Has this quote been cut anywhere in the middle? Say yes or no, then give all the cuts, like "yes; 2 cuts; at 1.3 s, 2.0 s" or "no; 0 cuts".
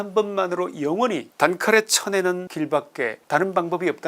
yes; 2 cuts; at 1.3 s, 2.9 s